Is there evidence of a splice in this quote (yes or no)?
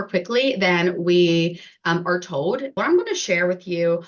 yes